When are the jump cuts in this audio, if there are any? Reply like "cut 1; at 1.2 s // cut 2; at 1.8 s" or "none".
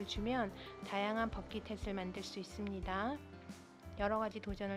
none